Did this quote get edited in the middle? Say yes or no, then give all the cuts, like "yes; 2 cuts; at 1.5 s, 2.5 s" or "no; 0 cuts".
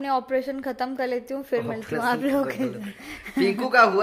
no; 0 cuts